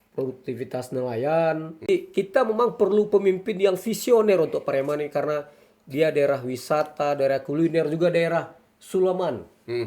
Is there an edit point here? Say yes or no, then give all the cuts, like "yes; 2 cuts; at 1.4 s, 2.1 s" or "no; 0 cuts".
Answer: yes; 1 cut; at 1.9 s